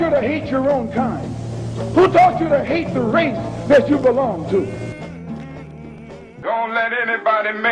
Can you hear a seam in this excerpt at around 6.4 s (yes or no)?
yes